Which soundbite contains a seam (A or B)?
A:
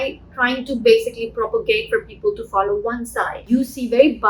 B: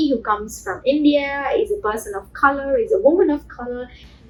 A